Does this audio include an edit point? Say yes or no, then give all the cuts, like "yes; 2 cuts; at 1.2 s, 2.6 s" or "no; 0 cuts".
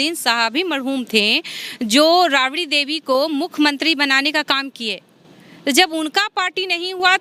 no; 0 cuts